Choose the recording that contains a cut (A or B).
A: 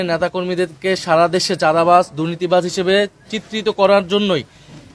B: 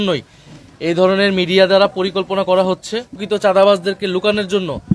B